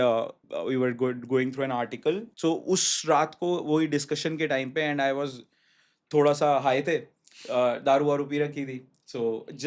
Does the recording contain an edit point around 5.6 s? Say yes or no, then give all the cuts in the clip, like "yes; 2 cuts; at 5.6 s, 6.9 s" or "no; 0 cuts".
no; 1 cut; at 2.3 s